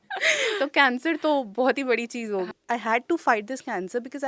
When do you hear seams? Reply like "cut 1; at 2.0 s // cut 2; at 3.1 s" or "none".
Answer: cut 1; at 2.5 s